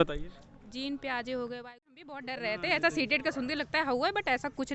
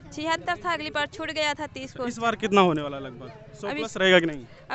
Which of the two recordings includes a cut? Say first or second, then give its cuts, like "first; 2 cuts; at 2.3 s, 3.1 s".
first; 1 cut; at 2.1 s